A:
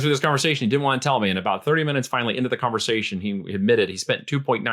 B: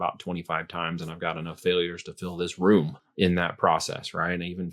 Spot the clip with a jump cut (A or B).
B